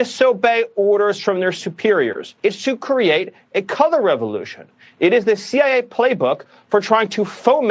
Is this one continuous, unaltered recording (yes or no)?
no